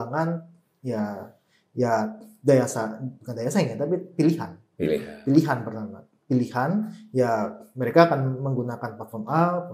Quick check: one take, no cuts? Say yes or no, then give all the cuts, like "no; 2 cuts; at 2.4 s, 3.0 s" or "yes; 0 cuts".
yes; 0 cuts